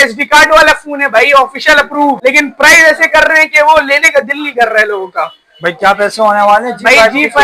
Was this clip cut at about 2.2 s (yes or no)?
yes